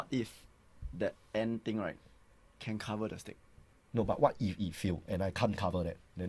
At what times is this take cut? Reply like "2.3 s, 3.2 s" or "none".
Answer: none